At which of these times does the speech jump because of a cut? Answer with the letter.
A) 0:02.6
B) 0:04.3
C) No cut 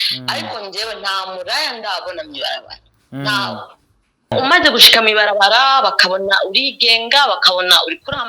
B